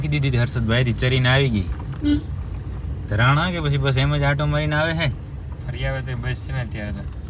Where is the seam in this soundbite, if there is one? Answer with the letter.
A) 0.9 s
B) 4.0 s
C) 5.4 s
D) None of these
D